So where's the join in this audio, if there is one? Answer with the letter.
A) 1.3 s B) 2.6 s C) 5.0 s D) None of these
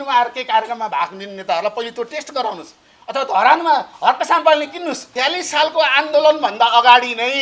C